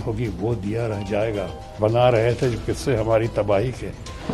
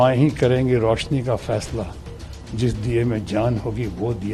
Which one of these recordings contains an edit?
first; 1 cut; at 1.8 s

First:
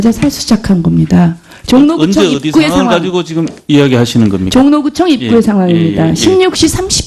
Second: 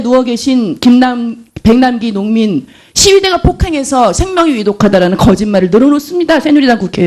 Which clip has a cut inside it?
second; 1 cut; at 6.1 s

